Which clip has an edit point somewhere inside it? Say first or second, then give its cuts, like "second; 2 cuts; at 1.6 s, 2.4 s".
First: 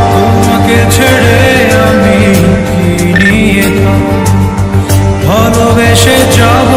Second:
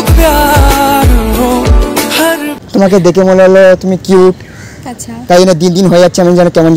second; 1 cut; at 2.6 s